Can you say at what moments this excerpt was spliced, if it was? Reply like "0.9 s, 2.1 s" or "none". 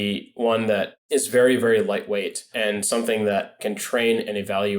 2.4 s, 3.6 s